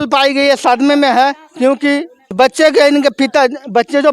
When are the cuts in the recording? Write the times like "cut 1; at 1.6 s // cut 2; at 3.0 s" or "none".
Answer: cut 1; at 2.2 s